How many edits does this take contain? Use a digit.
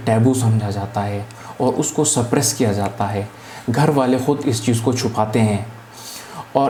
0